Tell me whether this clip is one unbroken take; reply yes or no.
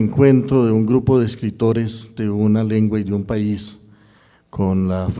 no